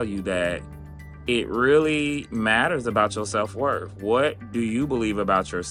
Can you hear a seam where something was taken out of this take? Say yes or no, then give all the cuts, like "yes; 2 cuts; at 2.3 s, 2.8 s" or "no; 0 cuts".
no; 0 cuts